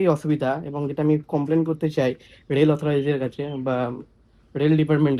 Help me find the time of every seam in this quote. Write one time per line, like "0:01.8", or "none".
none

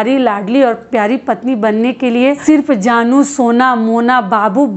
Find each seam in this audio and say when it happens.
0:02.4

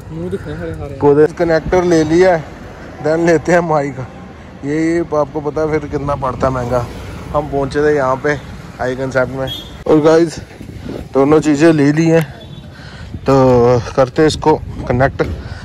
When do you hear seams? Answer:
0:01.3
0:09.8

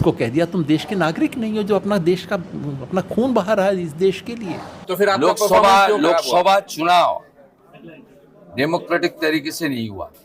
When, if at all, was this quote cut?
0:04.9

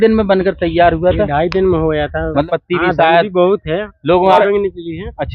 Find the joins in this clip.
0:02.4
0:04.4

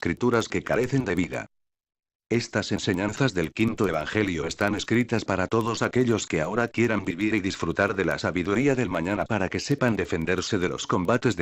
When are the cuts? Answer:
none

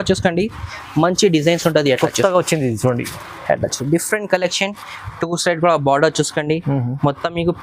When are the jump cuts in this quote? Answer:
none

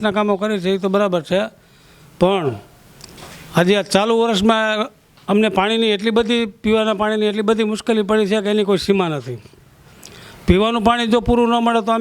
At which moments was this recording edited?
none

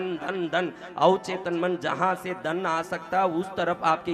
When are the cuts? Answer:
none

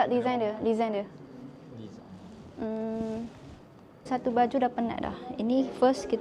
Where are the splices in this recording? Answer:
0:04.1

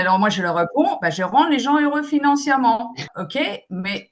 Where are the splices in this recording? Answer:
0:03.1

